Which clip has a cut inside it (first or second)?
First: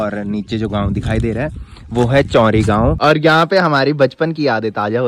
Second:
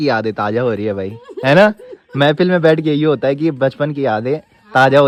first